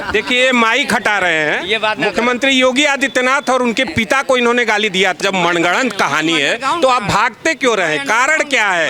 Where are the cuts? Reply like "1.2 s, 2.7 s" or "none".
5.2 s